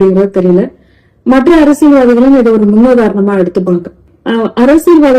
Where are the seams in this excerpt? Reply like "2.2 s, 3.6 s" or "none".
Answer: 4.1 s